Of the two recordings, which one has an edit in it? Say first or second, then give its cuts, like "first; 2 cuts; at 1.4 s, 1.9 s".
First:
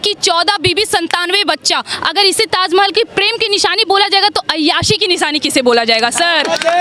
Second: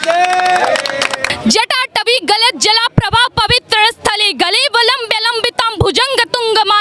second; 1 cut; at 1.2 s